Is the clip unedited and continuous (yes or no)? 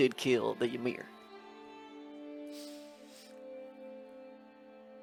yes